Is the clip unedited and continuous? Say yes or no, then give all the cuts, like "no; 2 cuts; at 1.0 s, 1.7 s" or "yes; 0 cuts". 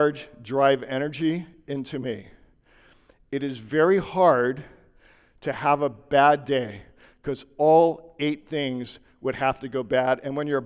yes; 0 cuts